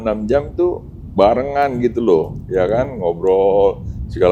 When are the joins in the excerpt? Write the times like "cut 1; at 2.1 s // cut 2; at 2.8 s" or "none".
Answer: none

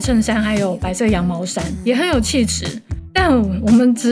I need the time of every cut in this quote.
cut 1; at 3.1 s

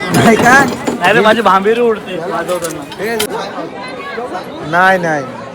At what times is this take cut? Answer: cut 1; at 3.3 s

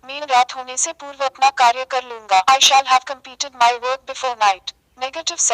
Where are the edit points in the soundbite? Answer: cut 1; at 1.5 s

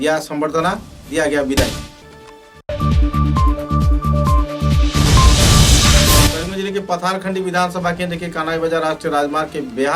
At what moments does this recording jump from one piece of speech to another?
none

